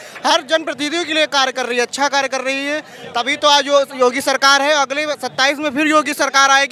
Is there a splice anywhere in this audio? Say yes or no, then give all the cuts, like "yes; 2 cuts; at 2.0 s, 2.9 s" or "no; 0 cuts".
no; 0 cuts